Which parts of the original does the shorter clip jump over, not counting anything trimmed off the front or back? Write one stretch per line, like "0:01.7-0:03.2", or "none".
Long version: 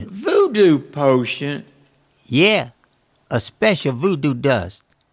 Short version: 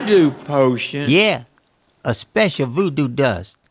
0:01.4-0:02.2